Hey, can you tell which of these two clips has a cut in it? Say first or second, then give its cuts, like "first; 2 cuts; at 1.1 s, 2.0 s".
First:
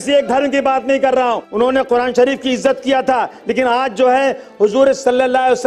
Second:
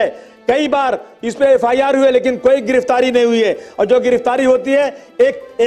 first; 1 cut; at 1.3 s